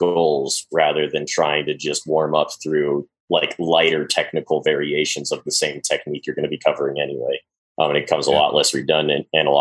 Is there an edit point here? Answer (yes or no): yes